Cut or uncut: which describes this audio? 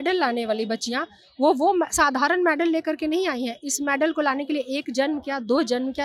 uncut